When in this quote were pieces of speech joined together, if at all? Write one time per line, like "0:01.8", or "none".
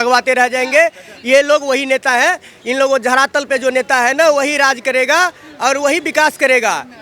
none

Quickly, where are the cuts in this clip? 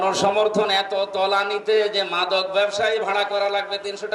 none

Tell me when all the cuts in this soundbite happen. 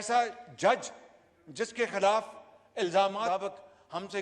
0:03.2

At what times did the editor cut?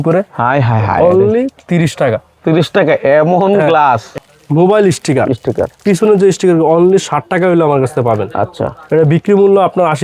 0:04.1

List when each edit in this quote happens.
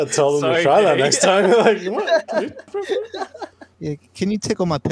0:02.7
0:03.6

